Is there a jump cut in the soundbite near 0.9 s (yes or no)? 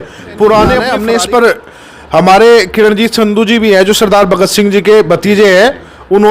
yes